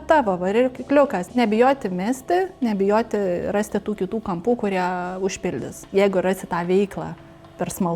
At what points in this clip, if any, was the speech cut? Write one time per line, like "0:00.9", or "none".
0:01.3
0:05.8